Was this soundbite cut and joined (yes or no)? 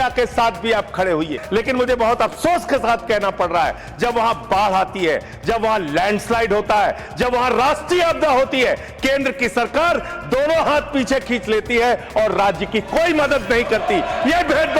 yes